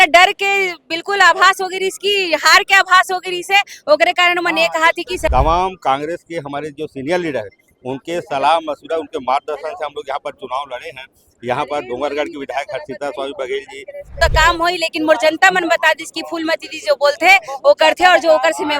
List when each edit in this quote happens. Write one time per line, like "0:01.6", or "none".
0:05.3
0:14.2